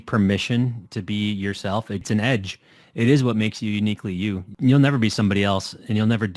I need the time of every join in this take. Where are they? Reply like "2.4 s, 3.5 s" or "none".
2.0 s, 4.5 s